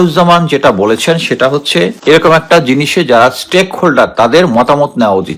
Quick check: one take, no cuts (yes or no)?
no